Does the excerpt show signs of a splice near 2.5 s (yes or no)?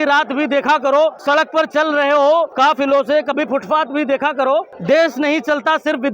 yes